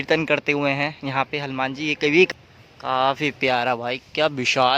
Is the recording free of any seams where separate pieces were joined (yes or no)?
no